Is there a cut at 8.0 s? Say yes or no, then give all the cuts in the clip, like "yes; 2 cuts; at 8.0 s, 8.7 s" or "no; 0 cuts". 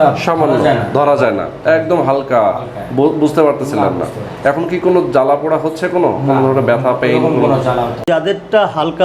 yes; 1 cut; at 8.0 s